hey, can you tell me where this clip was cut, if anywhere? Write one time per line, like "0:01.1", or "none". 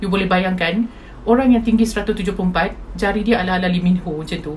none

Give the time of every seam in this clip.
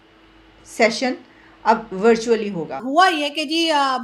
0:02.8

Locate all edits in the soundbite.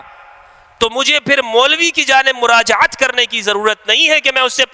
none

